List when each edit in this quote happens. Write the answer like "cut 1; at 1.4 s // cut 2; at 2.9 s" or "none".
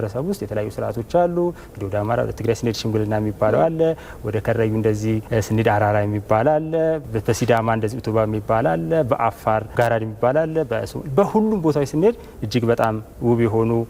cut 1; at 5.2 s // cut 2; at 9.7 s

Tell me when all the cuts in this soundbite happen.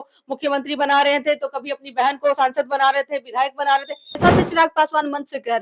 cut 1; at 4.2 s

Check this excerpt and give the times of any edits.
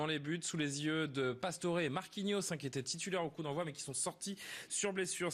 cut 1; at 1.9 s

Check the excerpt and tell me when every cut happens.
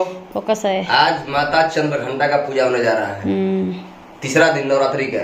none

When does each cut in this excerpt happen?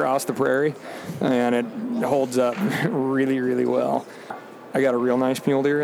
none

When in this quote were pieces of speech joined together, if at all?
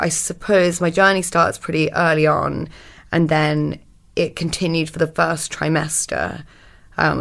cut 1; at 0.9 s // cut 2; at 5.1 s

